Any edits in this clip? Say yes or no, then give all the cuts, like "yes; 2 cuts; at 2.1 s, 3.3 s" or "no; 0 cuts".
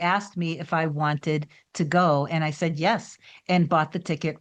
no; 0 cuts